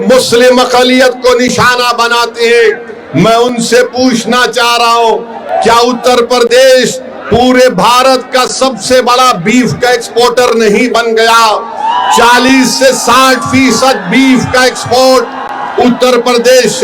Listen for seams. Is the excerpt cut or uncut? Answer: uncut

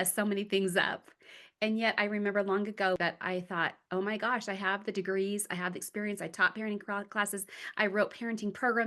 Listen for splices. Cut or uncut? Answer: cut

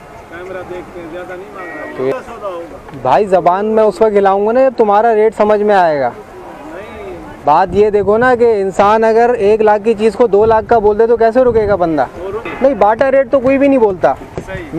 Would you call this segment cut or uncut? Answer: cut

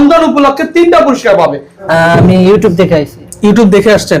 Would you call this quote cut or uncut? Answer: cut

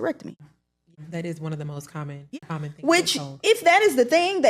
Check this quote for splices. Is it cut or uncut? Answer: cut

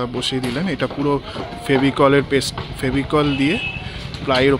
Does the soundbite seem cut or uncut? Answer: uncut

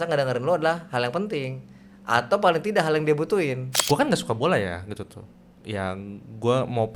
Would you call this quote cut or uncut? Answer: cut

